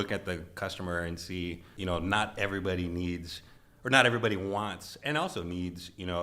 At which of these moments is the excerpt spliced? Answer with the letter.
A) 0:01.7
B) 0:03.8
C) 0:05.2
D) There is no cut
A